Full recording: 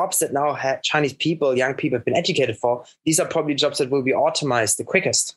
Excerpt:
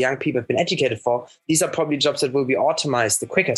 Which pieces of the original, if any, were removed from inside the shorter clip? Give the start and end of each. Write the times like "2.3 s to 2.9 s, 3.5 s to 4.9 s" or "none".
none